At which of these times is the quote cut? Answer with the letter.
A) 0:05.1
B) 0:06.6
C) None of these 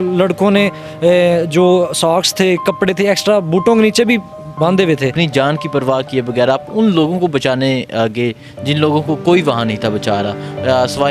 A